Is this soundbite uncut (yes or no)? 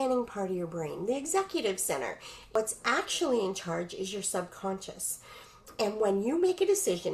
no